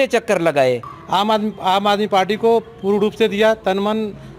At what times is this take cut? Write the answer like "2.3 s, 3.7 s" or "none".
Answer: 0.9 s

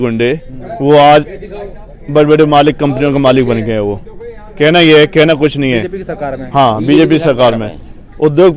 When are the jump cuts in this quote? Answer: none

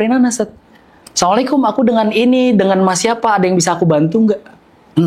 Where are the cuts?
none

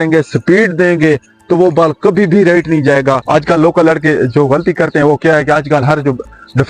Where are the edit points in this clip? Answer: 3.2 s

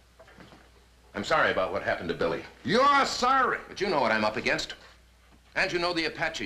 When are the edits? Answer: 2.7 s

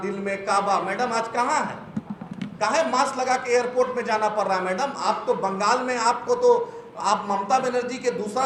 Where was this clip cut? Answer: none

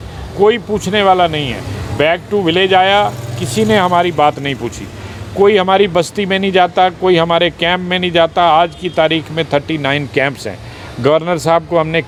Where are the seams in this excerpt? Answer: none

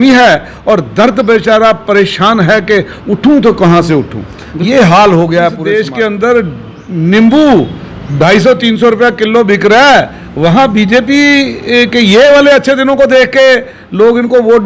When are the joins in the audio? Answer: 5.6 s

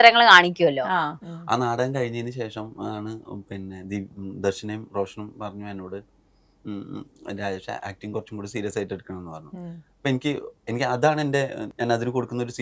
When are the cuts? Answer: 1.1 s, 11.6 s

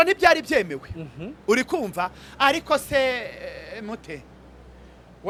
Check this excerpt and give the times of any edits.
none

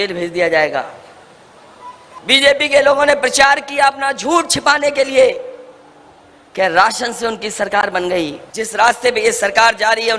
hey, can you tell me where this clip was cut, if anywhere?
2.1 s, 8.4 s

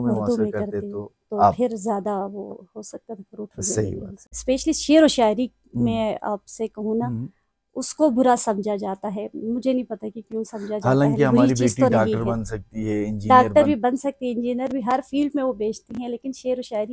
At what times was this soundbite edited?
4.3 s

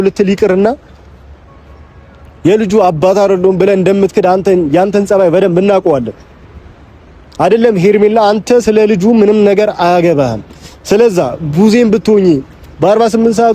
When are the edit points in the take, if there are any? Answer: none

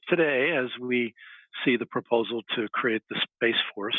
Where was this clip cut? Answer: none

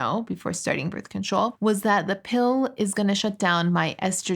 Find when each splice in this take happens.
1.5 s

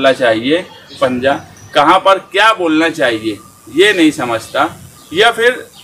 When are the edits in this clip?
1.1 s

